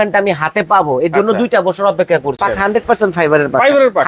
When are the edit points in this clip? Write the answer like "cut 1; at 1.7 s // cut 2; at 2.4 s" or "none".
cut 1; at 2.4 s